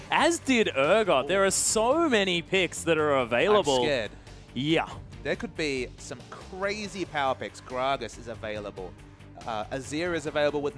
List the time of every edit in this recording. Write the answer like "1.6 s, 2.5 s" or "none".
5.0 s